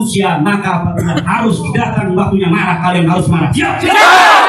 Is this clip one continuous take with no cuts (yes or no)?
yes